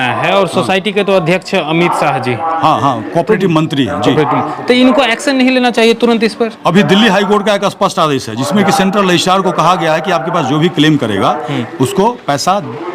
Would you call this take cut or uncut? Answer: uncut